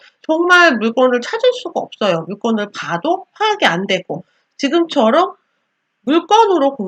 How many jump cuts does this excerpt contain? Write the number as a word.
zero